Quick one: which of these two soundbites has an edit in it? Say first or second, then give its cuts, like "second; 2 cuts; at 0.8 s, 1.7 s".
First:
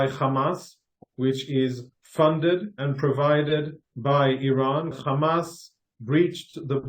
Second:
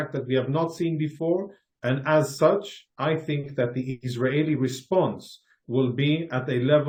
first; 1 cut; at 4.9 s